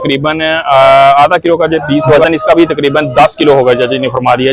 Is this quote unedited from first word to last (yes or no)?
no